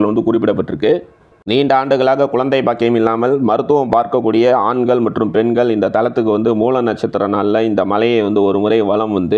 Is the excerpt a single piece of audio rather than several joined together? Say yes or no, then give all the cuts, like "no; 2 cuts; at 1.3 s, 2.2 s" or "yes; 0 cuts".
yes; 0 cuts